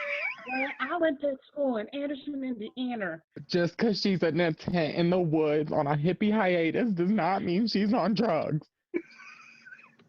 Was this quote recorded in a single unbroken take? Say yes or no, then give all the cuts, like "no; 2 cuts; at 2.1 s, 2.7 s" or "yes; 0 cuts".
no; 1 cut; at 3.3 s